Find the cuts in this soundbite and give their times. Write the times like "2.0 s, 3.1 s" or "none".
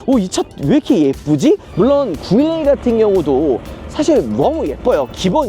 1.7 s